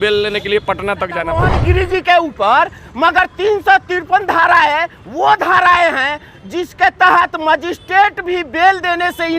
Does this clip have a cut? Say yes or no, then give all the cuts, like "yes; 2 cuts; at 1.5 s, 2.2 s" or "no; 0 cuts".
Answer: yes; 1 cut; at 1.5 s